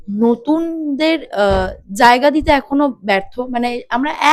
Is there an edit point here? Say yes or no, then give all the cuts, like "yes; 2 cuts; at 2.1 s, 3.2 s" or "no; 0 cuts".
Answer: no; 0 cuts